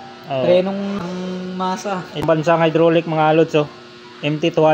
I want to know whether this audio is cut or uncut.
cut